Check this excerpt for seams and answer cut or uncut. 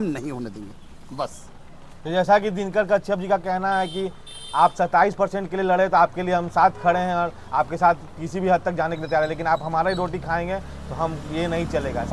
uncut